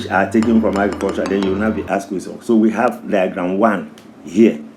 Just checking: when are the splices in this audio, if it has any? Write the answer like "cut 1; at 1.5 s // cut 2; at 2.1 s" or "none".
none